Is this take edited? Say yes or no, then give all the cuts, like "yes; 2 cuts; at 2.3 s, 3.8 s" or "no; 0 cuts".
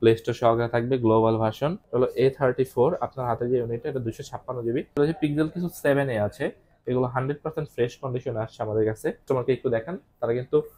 yes; 3 cuts; at 1.8 s, 4.9 s, 9.2 s